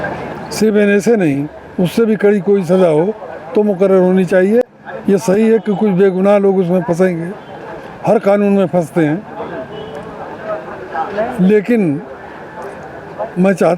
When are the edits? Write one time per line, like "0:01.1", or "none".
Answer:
none